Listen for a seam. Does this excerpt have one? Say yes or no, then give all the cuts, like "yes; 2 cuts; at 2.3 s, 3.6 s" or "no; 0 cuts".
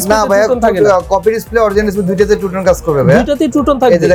no; 0 cuts